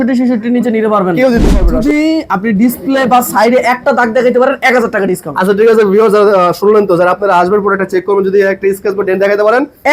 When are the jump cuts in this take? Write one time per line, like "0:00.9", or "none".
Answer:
0:01.4